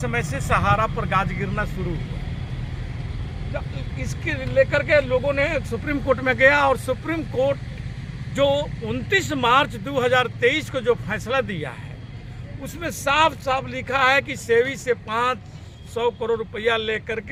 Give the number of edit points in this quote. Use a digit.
0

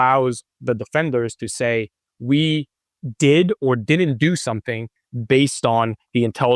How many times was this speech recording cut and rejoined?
0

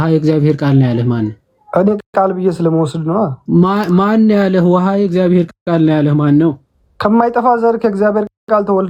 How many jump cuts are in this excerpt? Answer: 0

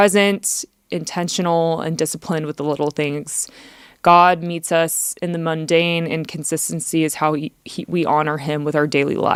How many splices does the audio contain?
0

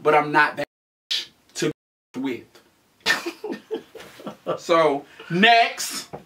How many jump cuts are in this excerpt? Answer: 0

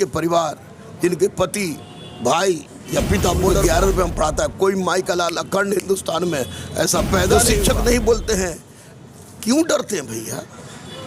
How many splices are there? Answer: 2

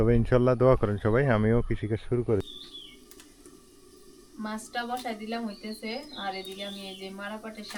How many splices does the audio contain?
1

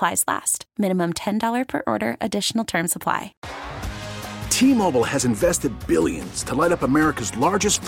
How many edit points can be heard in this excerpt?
1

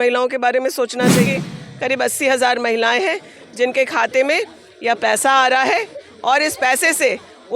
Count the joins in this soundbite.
1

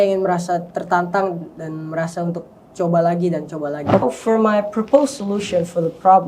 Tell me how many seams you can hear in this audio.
1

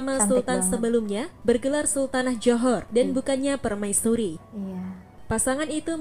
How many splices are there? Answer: 0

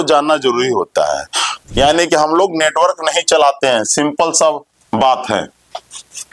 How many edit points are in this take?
1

